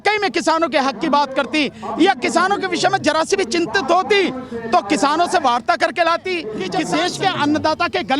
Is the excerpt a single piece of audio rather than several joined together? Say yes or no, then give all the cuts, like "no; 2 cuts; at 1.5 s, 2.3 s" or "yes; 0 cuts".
no; 1 cut; at 6.8 s